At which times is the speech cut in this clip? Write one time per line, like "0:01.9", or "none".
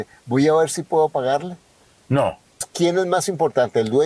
0:02.6